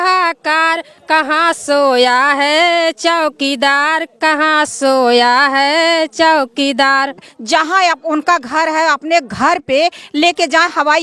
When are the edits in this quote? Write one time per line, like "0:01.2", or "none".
0:07.3